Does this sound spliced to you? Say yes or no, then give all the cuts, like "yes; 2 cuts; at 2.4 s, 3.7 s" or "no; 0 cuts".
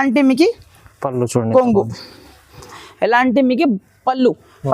yes; 1 cut; at 2.8 s